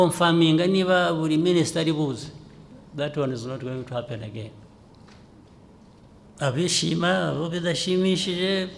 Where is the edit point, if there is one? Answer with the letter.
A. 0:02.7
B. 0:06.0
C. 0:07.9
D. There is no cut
B